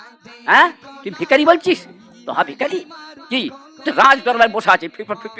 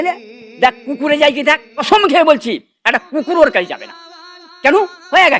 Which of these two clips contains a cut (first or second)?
second